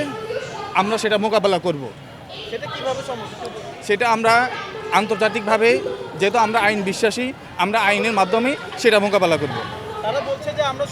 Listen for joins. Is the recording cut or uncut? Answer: uncut